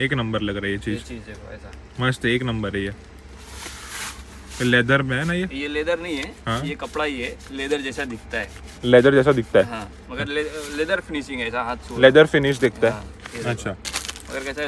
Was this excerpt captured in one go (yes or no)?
yes